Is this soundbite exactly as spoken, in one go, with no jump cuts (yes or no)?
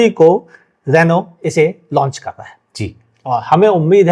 yes